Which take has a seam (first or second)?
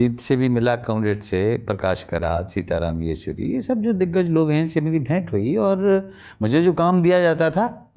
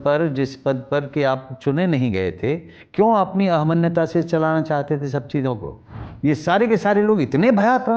second